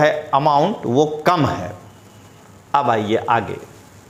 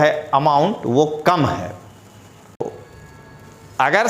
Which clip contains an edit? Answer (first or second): second